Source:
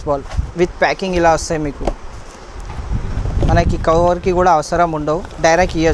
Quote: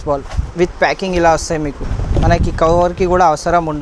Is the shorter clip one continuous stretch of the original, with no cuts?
no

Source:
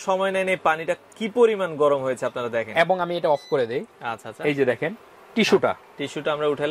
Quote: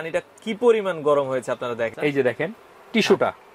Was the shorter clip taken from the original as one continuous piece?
no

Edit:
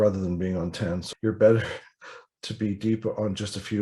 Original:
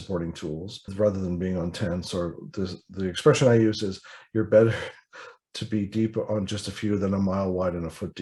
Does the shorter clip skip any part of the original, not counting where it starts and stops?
yes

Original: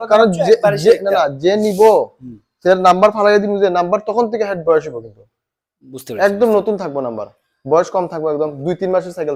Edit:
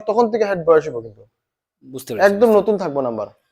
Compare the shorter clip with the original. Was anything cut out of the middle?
no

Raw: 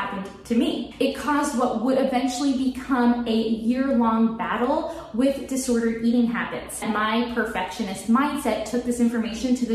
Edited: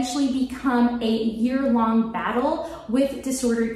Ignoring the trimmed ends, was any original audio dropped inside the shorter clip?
no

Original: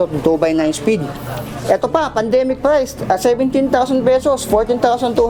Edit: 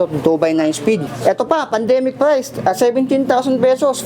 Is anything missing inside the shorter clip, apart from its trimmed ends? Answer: yes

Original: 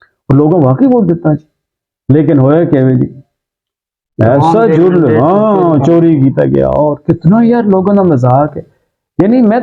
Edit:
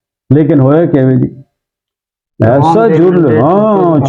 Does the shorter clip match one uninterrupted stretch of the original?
yes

